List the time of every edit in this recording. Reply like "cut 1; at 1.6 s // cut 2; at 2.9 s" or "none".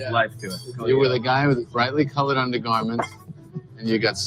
cut 1; at 1.0 s